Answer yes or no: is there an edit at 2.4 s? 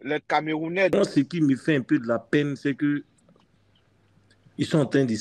no